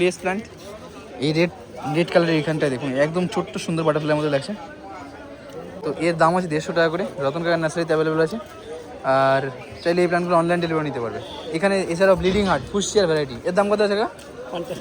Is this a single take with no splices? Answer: yes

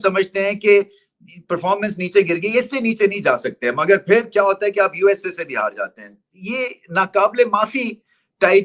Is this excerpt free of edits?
yes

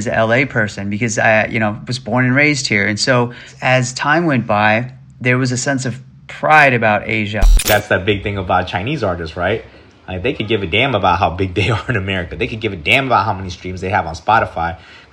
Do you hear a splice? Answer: yes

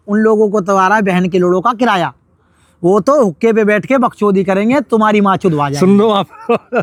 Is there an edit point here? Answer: no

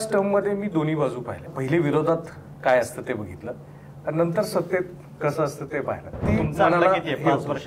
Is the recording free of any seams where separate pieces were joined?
no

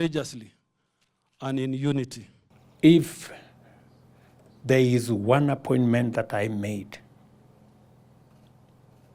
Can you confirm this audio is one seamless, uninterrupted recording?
no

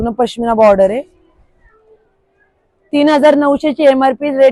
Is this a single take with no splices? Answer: yes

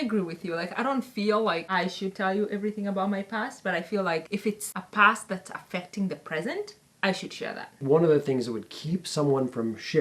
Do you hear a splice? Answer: yes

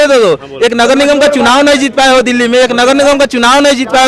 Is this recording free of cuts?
yes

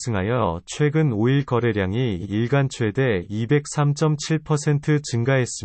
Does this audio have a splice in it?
yes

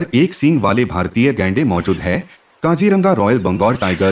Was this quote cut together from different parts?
yes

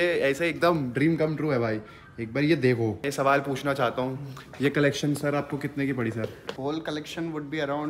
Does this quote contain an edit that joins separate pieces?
yes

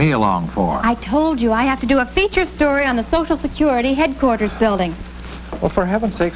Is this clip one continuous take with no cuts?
no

